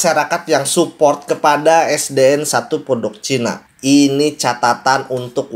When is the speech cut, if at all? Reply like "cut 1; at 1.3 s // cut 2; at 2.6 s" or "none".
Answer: cut 1; at 3.6 s

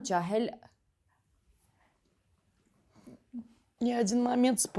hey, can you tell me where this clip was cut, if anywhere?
cut 1; at 3.6 s

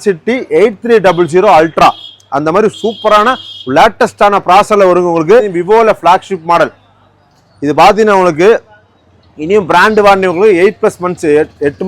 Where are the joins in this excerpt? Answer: cut 1; at 5.5 s

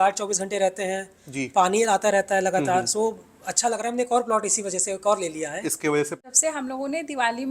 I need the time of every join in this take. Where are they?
cut 1; at 6.2 s

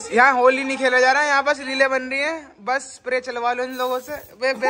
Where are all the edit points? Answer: none

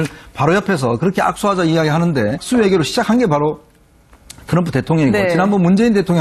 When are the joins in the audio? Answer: none

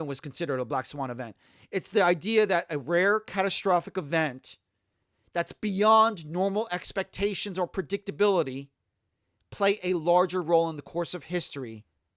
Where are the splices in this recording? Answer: none

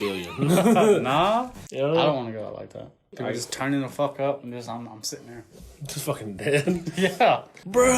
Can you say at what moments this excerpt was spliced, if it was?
cut 1; at 1.6 s

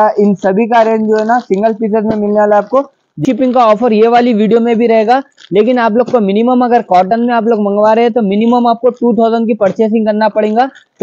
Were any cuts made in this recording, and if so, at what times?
cut 1; at 3.2 s

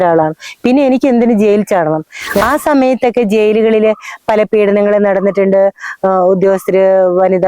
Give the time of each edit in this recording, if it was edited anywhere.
cut 1; at 2.4 s

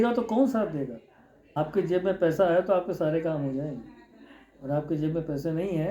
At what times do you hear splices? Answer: none

